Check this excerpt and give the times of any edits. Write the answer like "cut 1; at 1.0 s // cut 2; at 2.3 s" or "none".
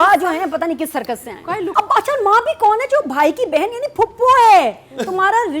cut 1; at 1.7 s